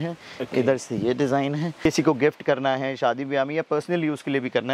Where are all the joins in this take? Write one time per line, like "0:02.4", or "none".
0:01.8